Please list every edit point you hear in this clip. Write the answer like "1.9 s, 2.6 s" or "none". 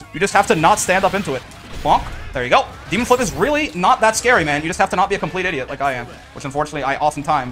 1.4 s